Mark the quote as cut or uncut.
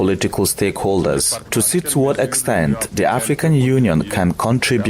cut